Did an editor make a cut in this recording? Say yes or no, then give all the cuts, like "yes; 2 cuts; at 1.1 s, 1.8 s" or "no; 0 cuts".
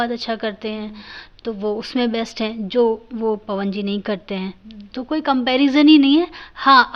no; 0 cuts